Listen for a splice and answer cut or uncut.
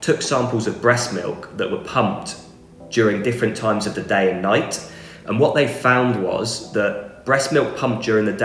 uncut